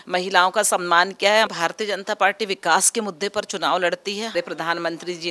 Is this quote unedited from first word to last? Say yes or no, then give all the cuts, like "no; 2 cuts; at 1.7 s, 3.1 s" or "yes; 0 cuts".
no; 2 cuts; at 1.5 s, 4.4 s